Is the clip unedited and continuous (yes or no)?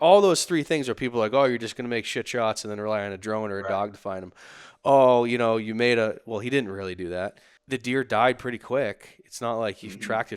yes